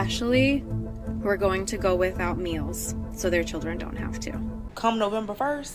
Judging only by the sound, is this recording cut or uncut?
cut